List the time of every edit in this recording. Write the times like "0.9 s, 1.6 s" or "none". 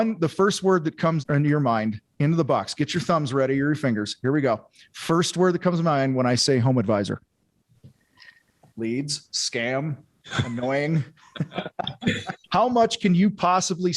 1.2 s, 8.7 s, 12.4 s